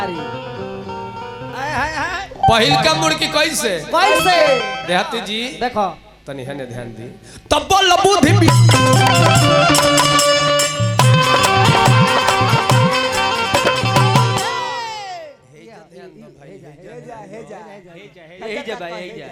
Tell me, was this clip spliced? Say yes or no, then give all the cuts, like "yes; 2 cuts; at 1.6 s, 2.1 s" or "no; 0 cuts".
no; 0 cuts